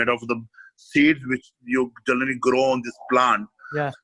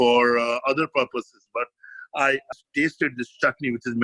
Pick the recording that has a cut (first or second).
second